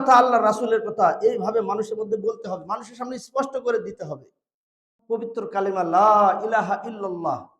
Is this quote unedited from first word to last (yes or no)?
no